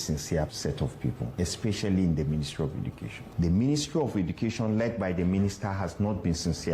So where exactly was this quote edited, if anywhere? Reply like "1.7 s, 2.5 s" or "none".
0.9 s, 3.3 s